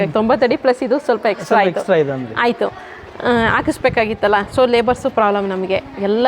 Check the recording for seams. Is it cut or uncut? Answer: uncut